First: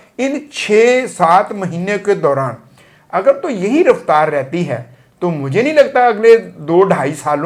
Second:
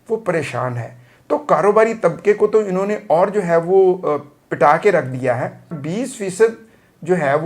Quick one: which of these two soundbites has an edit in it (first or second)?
second